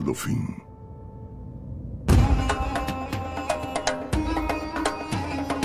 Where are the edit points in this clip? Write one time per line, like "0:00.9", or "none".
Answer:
0:01.0